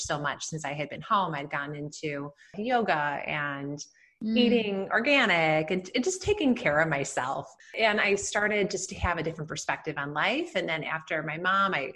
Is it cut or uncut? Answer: cut